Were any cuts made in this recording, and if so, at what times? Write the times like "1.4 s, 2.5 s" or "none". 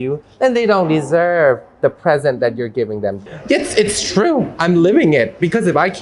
3.2 s

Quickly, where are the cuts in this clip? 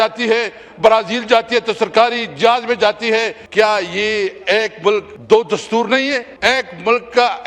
3.4 s, 5.1 s, 6.3 s

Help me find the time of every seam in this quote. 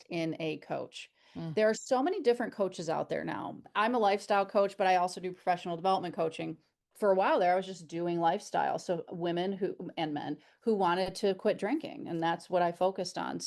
3.7 s, 6.8 s

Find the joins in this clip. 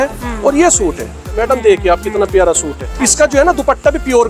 1.3 s, 2.8 s

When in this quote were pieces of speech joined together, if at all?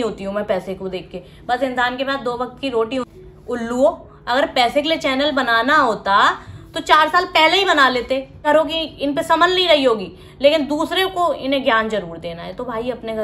3.2 s, 8.4 s

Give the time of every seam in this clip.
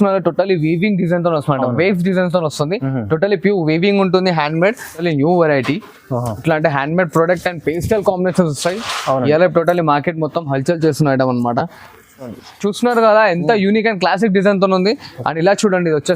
5.0 s, 12.3 s

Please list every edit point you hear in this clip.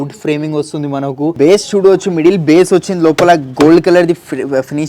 1.3 s

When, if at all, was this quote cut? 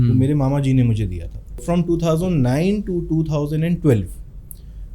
1.6 s

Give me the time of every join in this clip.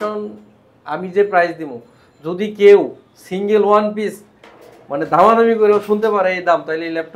none

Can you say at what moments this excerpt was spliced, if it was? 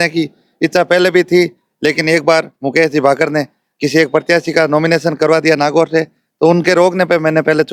none

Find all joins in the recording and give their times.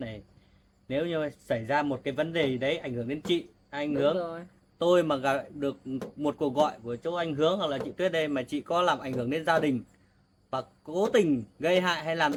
none

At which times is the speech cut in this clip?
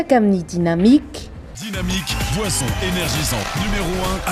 none

